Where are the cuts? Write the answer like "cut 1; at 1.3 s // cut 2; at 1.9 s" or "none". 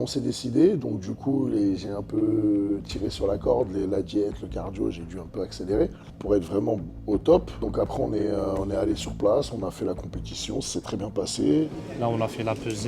cut 1; at 6.1 s // cut 2; at 7.5 s // cut 3; at 11.7 s